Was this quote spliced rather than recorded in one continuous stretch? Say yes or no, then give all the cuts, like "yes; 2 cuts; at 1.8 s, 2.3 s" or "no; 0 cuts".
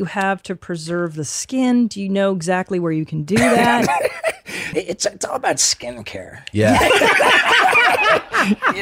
yes; 1 cut; at 4.7 s